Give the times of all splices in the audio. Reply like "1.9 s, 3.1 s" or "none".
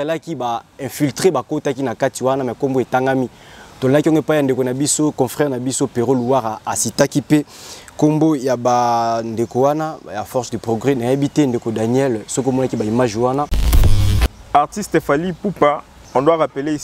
13.9 s